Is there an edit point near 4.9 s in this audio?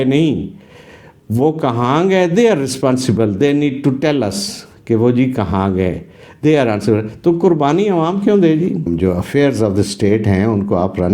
no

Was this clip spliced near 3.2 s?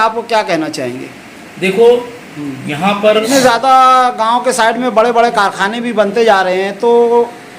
yes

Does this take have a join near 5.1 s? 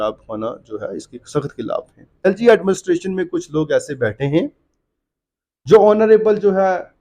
no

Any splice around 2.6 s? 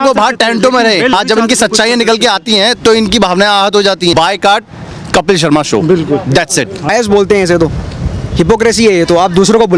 no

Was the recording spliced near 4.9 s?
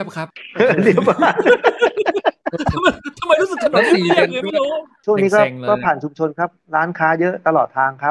yes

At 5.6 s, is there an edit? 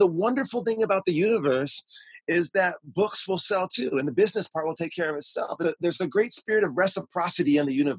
yes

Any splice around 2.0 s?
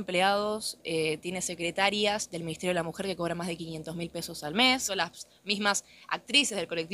no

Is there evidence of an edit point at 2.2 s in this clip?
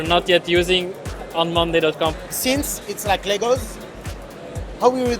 yes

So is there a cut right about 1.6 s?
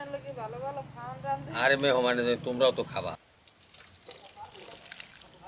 no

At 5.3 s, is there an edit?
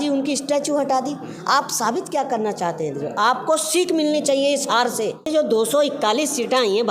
yes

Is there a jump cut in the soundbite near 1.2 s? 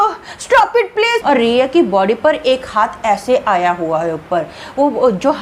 yes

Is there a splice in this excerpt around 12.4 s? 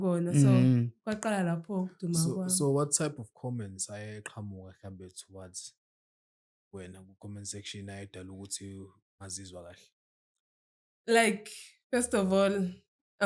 no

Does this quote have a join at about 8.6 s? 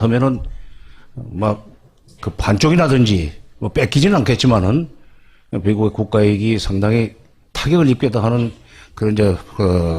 yes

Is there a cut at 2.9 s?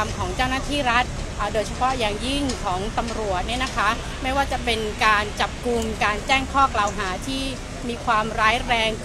no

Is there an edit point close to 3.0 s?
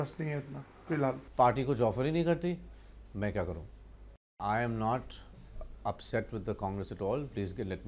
no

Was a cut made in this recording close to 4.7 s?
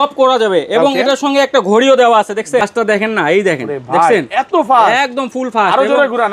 no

